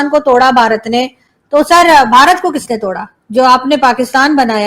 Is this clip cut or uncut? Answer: uncut